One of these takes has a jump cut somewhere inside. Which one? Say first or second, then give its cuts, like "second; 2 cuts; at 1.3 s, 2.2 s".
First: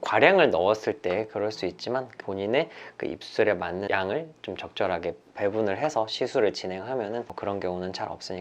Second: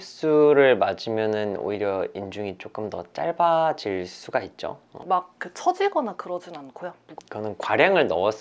second; 1 cut; at 4.9 s